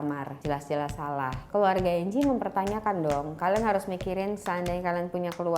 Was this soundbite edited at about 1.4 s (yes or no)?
yes